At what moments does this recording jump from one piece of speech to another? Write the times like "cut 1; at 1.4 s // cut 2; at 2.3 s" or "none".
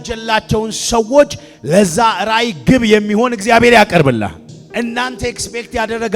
cut 1; at 4.4 s